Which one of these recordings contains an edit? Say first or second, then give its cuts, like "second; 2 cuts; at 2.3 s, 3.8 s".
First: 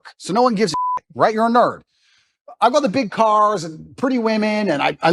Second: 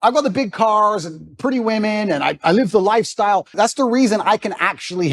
second; 1 cut; at 3.5 s